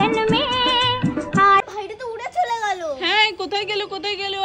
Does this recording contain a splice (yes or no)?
no